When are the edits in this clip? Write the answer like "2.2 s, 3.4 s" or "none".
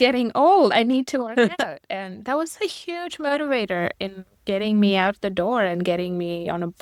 none